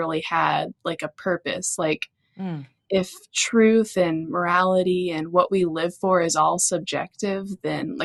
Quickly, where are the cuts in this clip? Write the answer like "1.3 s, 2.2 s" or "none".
none